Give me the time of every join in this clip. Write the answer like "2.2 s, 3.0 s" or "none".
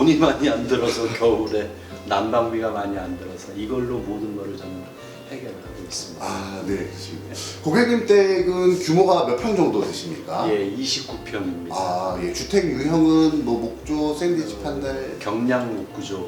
none